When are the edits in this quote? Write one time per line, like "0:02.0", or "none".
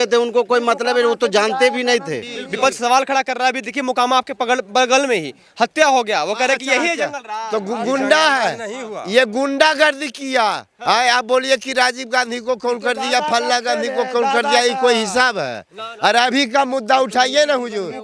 0:02.4
0:10.7